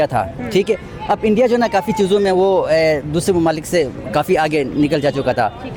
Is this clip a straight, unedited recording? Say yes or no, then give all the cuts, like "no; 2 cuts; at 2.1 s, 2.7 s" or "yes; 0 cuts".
yes; 0 cuts